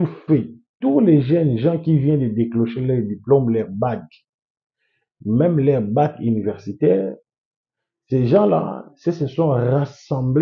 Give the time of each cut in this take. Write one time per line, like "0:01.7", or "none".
none